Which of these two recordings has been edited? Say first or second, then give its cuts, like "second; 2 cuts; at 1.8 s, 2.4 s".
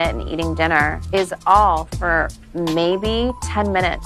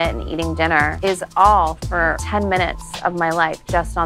second; 2 cuts; at 0.9 s, 2.2 s